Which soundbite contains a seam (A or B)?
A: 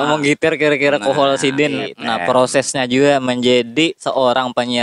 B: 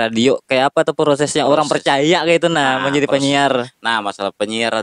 A